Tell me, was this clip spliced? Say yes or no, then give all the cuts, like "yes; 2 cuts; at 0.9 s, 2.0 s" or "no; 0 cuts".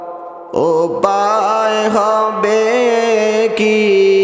no; 0 cuts